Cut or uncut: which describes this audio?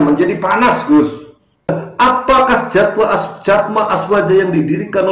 cut